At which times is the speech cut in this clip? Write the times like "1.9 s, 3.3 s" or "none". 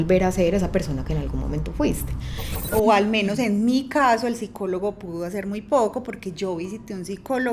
2.7 s